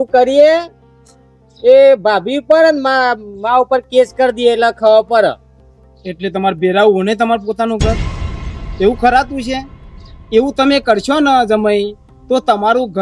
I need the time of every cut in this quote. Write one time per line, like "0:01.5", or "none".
none